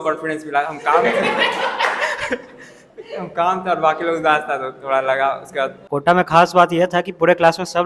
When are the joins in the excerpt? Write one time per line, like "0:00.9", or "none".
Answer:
0:05.8